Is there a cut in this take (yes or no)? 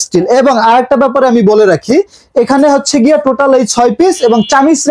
no